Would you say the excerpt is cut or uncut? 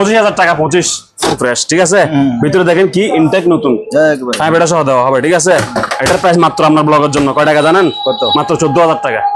cut